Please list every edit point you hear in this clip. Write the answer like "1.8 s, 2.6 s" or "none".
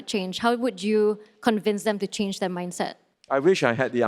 3.1 s